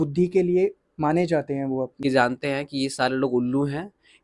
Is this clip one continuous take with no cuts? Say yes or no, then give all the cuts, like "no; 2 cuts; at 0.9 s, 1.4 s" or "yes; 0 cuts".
no; 1 cut; at 2.0 s